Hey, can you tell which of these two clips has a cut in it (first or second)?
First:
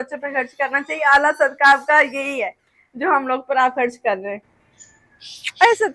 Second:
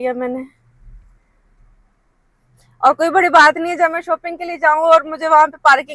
first